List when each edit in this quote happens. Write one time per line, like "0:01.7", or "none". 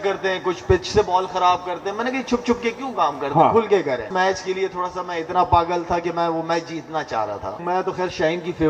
0:04.1
0:07.6